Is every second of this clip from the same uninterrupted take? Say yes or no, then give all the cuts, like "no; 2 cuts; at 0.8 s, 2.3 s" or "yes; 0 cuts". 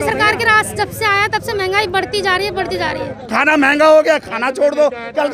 no; 1 cut; at 3.2 s